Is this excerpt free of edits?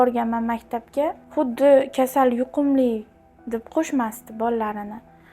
no; 2 cuts; at 1.2 s, 3.7 s

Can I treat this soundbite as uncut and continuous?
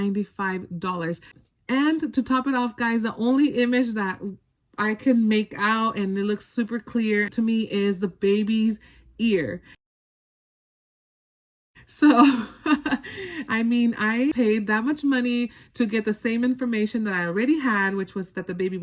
yes; 0 cuts

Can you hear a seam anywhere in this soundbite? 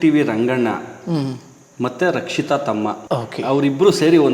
yes; 1 cut; at 3.0 s

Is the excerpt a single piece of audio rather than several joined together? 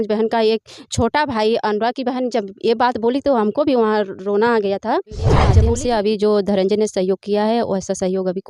no; 1 cut; at 5.5 s

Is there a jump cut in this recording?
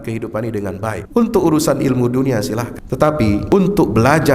yes; 3 cuts; at 1.0 s, 2.8 s, 3.5 s

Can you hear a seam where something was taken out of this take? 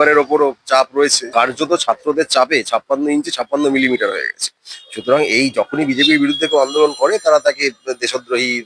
yes; 1 cut; at 1.2 s

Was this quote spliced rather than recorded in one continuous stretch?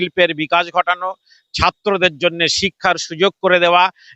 no; 0 cuts

